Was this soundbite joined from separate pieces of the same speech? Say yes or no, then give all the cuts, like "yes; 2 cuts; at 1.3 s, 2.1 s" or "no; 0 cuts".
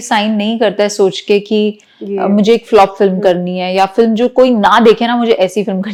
no; 0 cuts